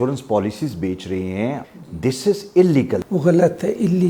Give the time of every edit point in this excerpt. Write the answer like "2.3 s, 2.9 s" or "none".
1.6 s, 3.0 s